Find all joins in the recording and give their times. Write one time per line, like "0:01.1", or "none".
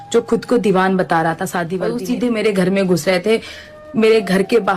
0:01.8